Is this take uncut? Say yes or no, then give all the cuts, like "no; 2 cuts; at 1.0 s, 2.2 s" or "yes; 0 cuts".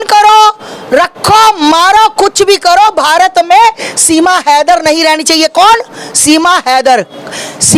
yes; 0 cuts